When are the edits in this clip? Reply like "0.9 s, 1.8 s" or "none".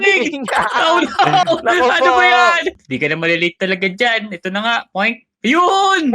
2.8 s